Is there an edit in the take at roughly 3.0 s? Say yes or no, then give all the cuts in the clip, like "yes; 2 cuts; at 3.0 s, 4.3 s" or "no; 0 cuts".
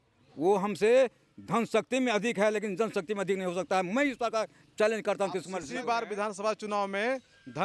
no; 1 cut; at 5.7 s